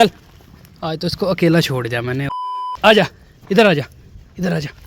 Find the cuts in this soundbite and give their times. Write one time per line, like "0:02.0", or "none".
0:02.4